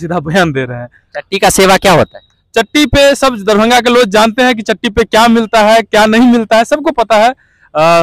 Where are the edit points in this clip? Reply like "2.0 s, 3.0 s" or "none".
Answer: none